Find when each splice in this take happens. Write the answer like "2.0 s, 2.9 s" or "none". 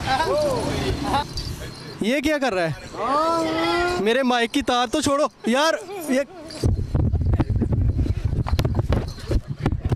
1.3 s